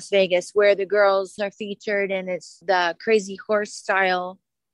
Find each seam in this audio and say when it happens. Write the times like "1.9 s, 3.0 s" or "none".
1.5 s, 2.6 s